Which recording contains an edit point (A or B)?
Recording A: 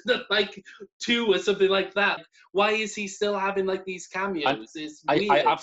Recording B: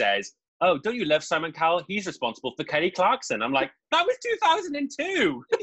A